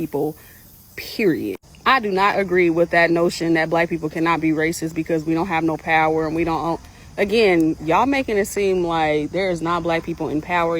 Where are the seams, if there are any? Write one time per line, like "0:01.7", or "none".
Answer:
0:09.6